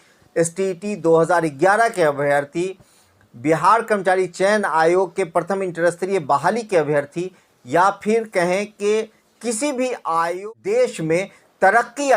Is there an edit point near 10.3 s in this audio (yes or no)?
yes